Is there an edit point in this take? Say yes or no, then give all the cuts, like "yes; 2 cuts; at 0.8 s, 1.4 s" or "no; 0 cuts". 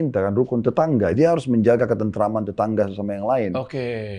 yes; 1 cut; at 1.1 s